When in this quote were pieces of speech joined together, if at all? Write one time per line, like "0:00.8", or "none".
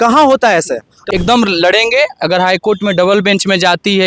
0:00.9